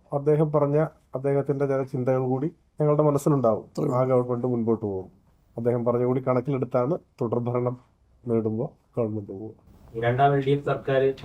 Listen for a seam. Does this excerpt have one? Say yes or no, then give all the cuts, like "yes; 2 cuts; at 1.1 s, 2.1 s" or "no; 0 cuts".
no; 0 cuts